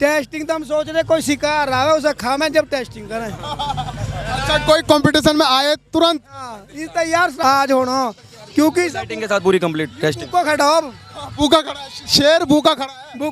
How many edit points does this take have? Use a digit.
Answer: 1